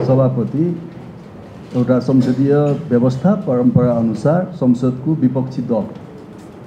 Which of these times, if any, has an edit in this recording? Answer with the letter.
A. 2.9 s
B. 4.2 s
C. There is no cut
C